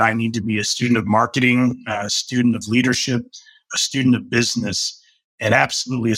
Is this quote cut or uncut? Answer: uncut